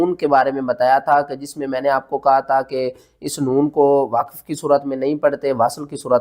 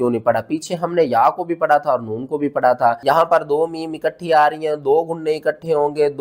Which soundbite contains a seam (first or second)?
second